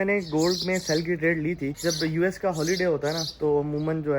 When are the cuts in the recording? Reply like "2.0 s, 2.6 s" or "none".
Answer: 1.7 s